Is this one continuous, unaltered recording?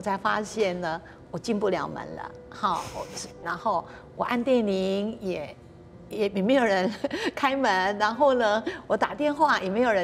no; 1 cut; at 3.4 s

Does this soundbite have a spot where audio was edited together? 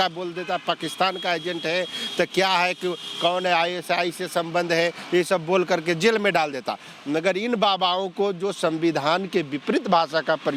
no; 0 cuts

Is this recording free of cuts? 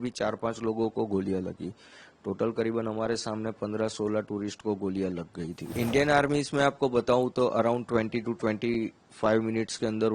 no; 1 cut; at 5.7 s

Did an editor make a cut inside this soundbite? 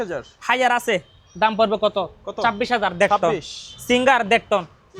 no; 0 cuts

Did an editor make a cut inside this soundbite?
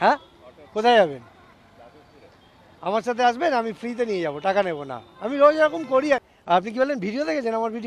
yes; 1 cut; at 6.2 s

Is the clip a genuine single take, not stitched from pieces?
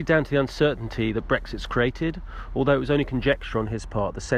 yes; 0 cuts

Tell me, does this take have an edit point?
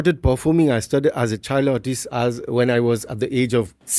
no; 0 cuts

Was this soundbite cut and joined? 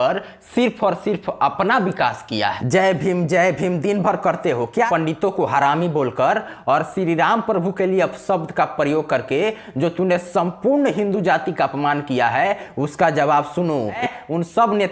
yes; 3 cuts; at 2.6 s, 4.9 s, 14.0 s

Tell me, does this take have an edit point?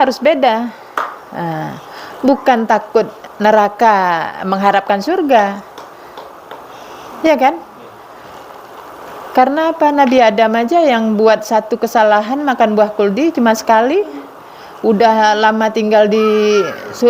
yes; 1 cut; at 3.2 s

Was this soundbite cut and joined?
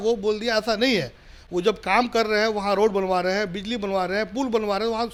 no; 0 cuts

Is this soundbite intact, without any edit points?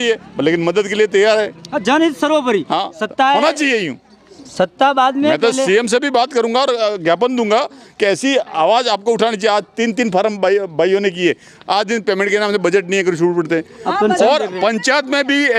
yes; 0 cuts

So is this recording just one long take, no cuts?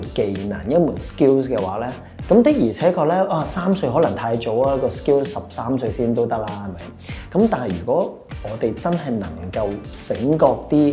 yes; 0 cuts

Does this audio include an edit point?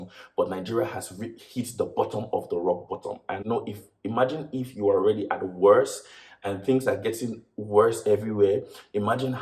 yes; 1 cut; at 3.4 s

